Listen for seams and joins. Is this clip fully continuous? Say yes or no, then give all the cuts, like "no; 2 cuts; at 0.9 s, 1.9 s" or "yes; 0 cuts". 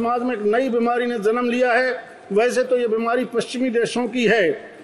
yes; 0 cuts